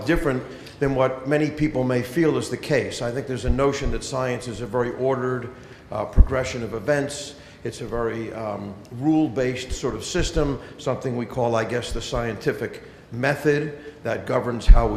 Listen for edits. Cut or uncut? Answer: uncut